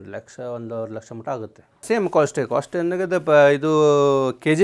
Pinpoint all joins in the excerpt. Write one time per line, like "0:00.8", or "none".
0:01.8